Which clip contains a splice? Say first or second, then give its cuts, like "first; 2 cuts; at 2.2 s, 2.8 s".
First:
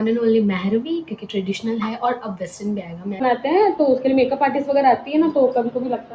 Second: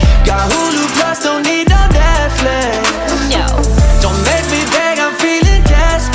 first; 1 cut; at 3.2 s